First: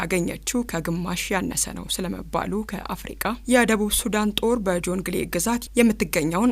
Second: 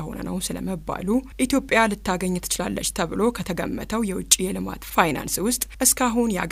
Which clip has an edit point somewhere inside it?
first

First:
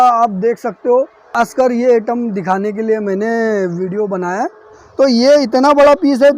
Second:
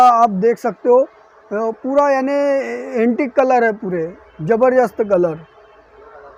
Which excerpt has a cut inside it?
first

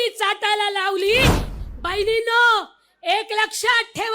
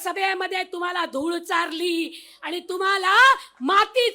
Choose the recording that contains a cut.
first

